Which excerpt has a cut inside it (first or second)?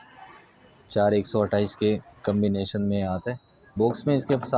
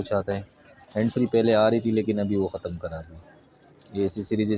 first